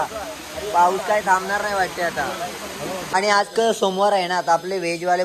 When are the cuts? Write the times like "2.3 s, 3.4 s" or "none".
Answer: 3.0 s